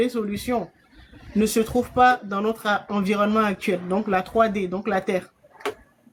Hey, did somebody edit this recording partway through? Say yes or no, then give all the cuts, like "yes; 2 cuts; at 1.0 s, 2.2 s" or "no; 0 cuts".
no; 0 cuts